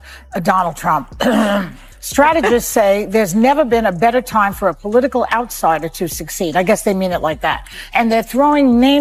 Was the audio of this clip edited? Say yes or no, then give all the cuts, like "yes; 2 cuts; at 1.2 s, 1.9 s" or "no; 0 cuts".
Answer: no; 0 cuts